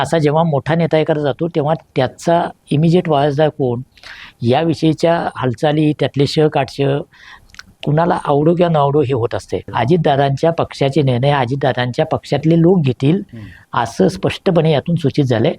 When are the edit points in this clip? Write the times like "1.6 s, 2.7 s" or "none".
9.7 s

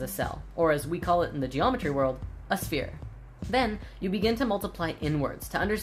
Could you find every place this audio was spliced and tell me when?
3.8 s

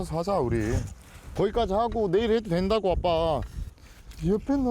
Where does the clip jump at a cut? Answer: 1.2 s

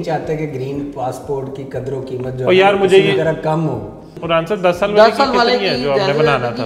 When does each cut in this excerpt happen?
none

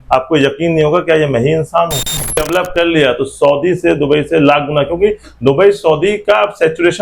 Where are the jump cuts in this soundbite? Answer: 2.4 s

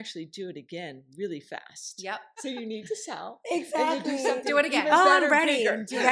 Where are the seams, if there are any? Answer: 2.3 s

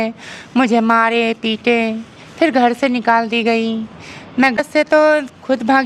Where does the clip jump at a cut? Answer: 4.9 s

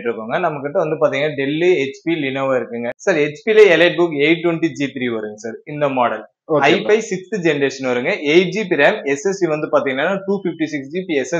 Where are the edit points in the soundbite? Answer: 2.9 s

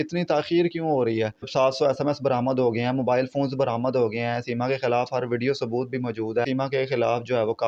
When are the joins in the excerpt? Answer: 1.5 s, 6.5 s

